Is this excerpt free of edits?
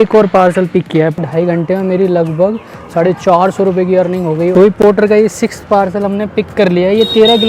no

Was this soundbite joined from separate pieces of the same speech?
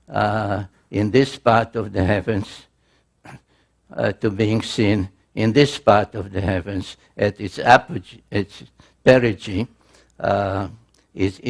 no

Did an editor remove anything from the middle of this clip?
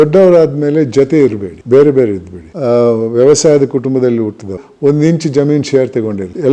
yes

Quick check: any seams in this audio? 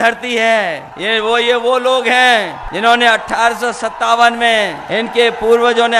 yes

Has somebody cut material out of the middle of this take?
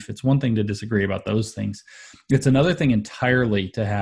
no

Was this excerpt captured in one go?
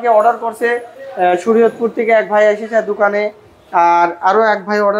yes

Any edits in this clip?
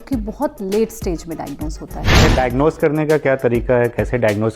yes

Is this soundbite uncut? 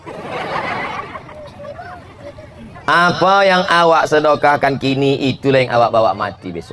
yes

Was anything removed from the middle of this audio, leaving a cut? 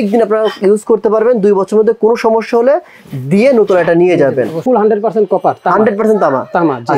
yes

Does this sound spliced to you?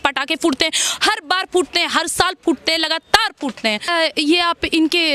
yes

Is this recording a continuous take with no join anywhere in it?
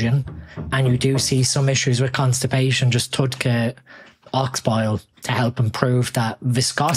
yes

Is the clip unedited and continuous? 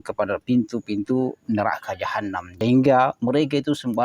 no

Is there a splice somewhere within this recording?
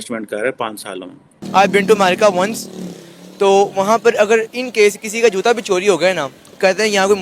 yes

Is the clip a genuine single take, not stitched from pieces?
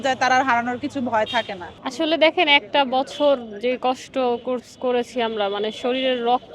no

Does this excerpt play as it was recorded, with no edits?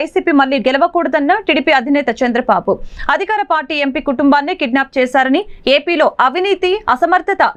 yes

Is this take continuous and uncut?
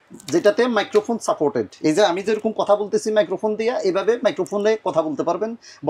yes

